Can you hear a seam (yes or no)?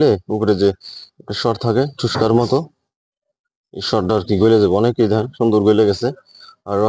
no